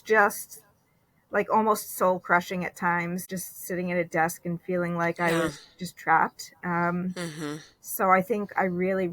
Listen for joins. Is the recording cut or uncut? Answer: cut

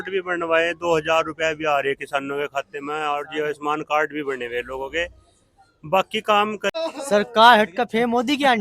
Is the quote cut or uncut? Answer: cut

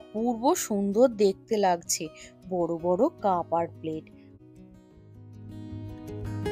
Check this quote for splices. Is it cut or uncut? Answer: cut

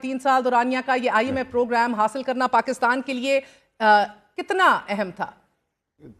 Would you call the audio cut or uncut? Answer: uncut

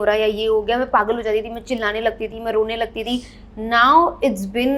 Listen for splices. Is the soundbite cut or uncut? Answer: uncut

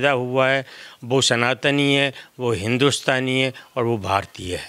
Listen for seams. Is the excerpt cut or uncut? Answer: uncut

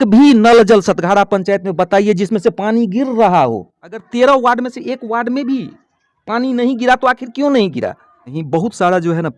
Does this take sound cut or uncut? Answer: cut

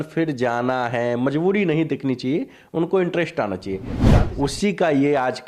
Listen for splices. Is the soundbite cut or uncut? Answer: cut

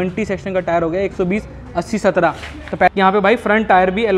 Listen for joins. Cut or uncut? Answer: cut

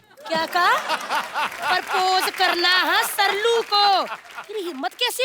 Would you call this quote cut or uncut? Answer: uncut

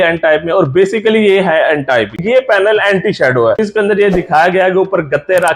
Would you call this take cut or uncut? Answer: cut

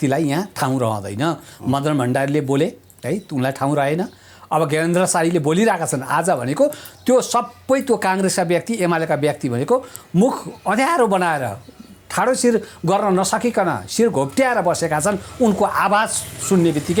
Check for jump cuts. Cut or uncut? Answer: uncut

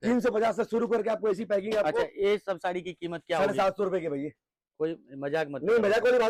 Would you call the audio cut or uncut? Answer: uncut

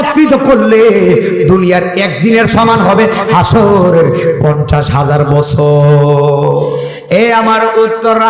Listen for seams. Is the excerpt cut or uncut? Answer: cut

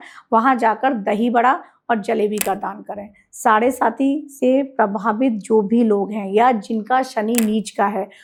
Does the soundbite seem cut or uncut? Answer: uncut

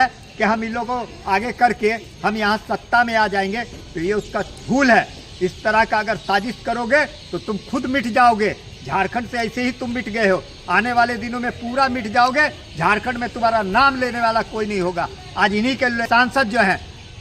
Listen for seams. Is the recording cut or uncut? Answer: cut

